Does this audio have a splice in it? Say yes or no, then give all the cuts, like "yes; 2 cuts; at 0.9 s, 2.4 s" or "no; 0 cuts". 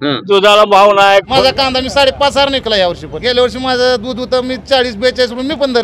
yes; 2 cuts; at 1.3 s, 3.1 s